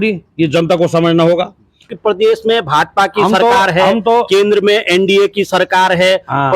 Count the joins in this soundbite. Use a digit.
1